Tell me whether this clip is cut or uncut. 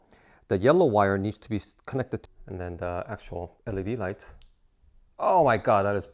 cut